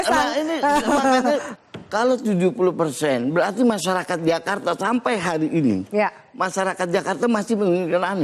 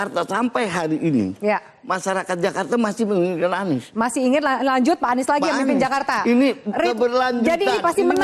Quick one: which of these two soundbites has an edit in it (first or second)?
first